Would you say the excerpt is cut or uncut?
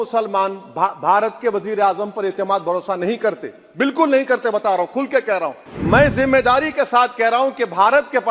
cut